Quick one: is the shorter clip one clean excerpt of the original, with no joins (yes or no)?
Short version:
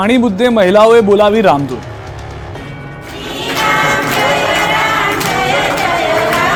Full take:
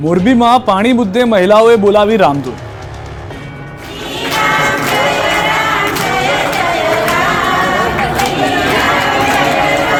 yes